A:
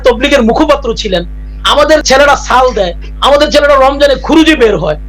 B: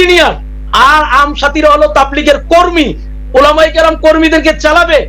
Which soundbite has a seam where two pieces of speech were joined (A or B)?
A